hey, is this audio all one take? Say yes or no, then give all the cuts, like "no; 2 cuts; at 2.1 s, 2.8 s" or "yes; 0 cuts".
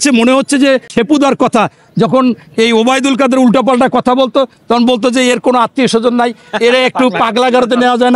no; 1 cut; at 0.9 s